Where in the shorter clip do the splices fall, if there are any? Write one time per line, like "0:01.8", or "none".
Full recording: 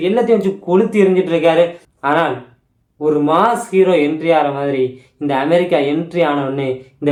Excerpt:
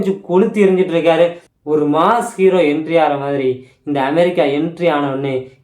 0:01.5